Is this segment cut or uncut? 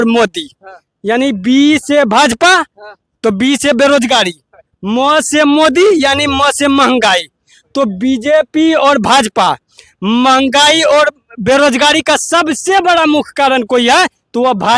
uncut